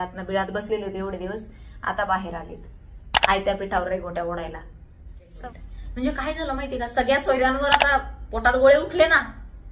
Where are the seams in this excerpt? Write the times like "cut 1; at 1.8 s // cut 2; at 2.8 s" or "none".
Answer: cut 1; at 5.3 s